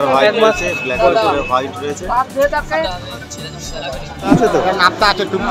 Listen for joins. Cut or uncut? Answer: cut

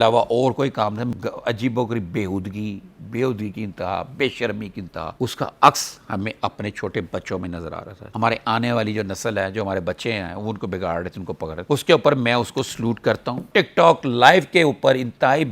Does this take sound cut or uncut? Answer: cut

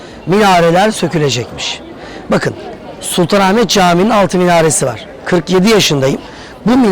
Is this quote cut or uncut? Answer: uncut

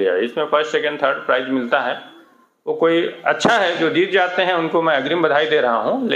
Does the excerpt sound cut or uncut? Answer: uncut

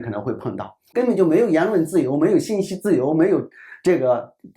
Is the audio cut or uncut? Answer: cut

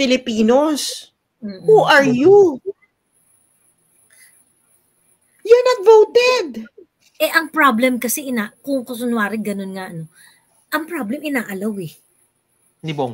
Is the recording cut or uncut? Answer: uncut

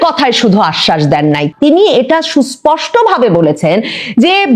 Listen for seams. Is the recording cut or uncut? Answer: cut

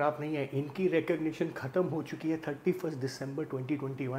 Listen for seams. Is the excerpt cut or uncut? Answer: uncut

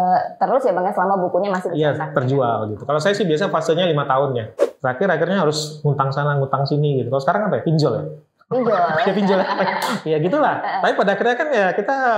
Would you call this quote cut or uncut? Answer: cut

